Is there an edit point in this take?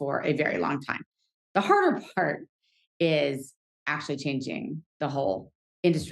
no; 0 cuts

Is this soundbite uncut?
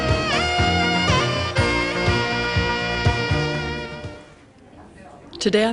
no; 1 cut; at 1.1 s

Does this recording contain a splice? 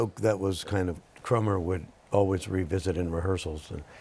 yes; 1 cut; at 1.1 s

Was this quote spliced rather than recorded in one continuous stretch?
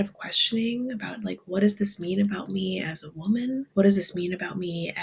yes; 1 cut; at 3.7 s

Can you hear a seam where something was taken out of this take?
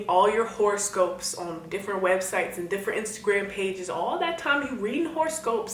no; 0 cuts

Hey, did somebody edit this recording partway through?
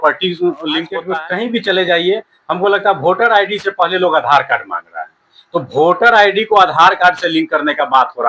yes; 1 cut; at 1.1 s

